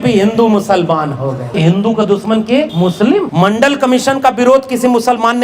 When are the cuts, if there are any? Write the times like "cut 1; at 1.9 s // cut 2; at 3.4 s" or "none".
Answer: cut 1; at 1.5 s // cut 2; at 2.8 s